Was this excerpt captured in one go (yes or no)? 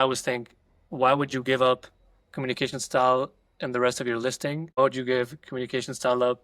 no